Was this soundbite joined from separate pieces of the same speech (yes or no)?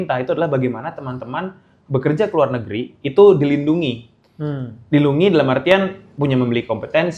no